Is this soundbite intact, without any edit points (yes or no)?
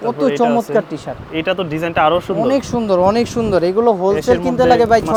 yes